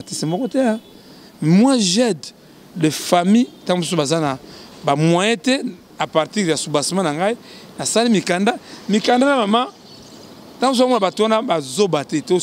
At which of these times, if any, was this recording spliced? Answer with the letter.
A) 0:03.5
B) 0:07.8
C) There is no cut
C